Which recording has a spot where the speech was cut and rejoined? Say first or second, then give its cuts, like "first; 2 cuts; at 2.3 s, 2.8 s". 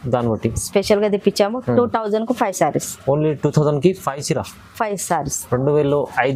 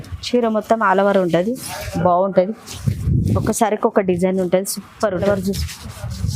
second; 1 cut; at 5.2 s